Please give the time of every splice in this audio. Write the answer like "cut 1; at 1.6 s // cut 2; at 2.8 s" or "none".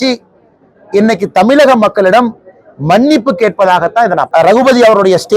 cut 1; at 4.3 s